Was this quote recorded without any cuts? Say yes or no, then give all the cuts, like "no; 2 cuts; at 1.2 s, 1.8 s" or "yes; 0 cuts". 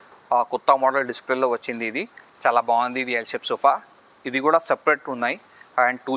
yes; 0 cuts